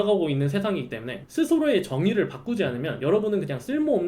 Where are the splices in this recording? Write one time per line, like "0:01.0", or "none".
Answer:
0:01.1